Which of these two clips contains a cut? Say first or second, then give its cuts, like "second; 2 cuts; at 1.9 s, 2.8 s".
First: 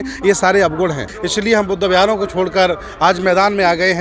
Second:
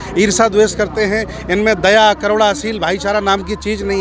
first; 1 cut; at 1.1 s